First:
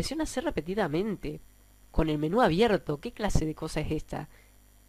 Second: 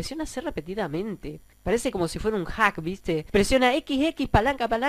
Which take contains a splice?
second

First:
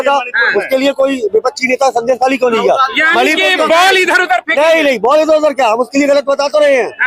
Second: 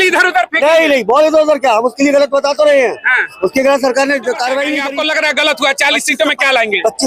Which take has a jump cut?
second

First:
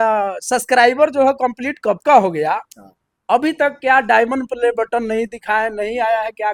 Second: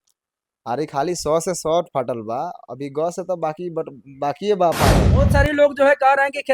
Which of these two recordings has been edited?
second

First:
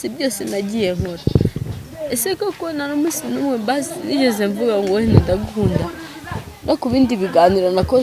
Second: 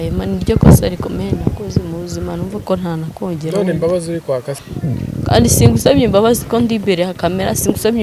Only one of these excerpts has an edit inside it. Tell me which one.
second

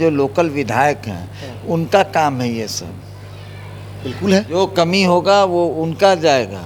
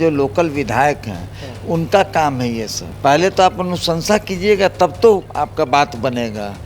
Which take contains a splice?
second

